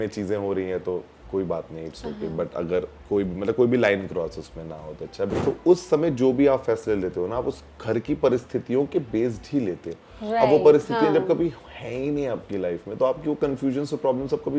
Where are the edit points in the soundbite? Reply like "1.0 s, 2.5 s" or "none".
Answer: 5.3 s